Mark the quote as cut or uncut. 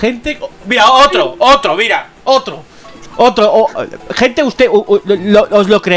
uncut